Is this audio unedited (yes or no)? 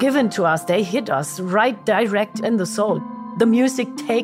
no